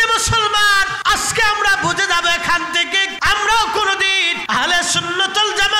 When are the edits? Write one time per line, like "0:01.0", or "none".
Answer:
0:00.9
0:03.1
0:04.3